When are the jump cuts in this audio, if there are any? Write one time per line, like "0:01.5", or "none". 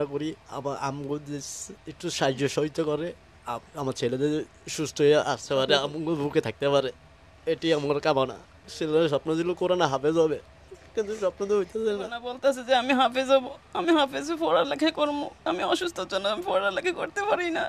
0:12.2